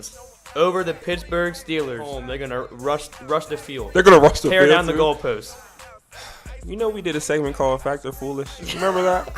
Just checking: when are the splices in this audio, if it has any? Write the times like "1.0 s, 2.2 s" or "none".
2.2 s